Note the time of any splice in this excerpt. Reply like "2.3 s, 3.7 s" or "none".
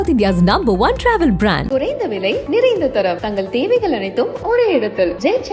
none